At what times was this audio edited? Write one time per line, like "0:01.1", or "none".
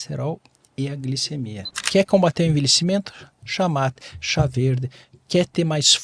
0:01.8